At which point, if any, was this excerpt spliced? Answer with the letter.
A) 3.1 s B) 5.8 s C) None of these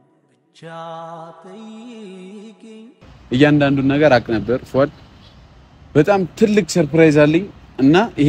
A